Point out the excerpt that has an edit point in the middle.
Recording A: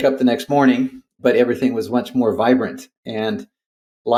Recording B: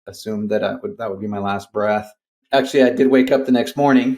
B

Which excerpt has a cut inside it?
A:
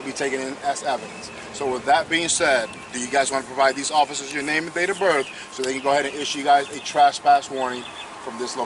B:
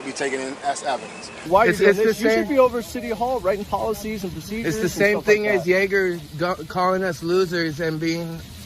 B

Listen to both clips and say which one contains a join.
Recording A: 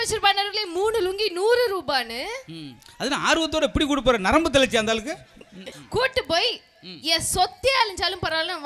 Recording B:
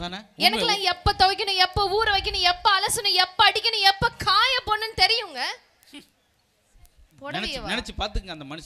A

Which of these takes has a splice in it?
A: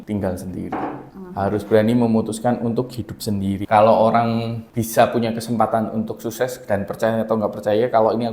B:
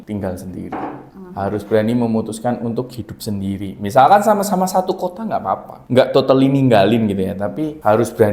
A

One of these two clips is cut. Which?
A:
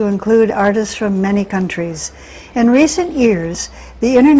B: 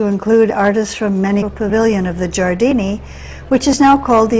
A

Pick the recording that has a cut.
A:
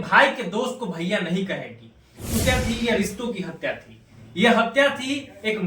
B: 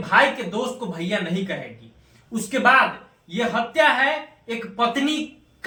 A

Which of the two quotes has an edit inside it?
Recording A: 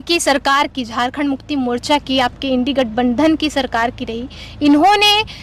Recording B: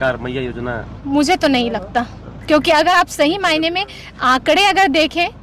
B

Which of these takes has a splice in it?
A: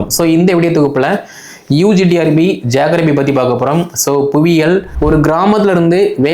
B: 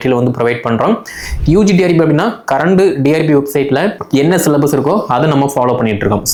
A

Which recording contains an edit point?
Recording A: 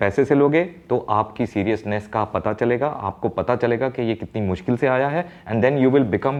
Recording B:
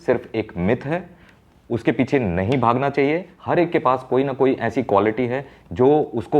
B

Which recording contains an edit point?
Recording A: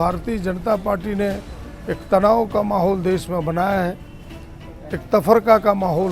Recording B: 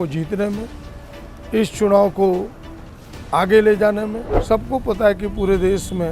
B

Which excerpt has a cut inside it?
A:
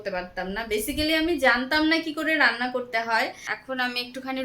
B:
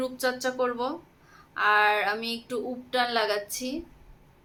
A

